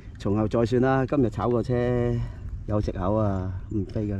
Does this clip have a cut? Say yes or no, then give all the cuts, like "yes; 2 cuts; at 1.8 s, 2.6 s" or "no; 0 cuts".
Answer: no; 0 cuts